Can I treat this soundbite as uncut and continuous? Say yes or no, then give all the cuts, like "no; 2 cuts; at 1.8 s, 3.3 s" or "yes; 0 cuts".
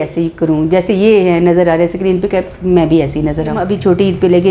no; 1 cut; at 3.6 s